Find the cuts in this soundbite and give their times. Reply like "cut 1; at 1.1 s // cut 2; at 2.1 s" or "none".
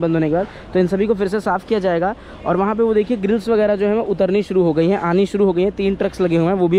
none